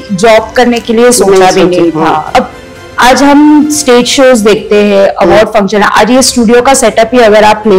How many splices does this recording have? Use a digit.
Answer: 1